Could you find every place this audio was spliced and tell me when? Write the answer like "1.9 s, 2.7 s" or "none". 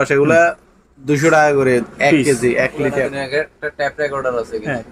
none

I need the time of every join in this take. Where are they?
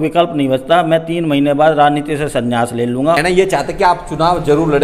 3.2 s

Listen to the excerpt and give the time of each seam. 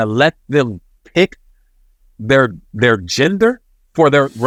none

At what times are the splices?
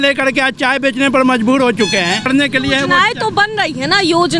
2.2 s

